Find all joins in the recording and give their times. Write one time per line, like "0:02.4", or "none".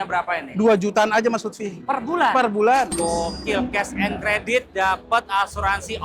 0:02.9